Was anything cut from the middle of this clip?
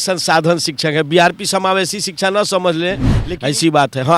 yes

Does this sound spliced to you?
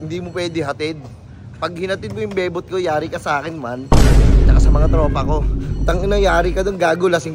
no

